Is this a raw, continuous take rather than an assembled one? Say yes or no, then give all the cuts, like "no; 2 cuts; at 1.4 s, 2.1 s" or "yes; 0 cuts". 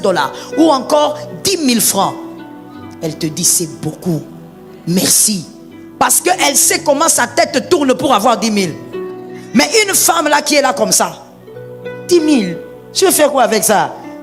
yes; 0 cuts